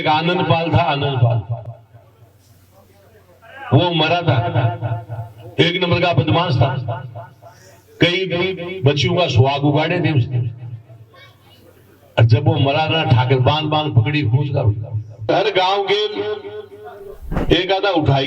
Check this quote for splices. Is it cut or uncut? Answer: cut